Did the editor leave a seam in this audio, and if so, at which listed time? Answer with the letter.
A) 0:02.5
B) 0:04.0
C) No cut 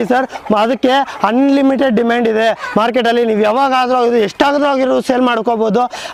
C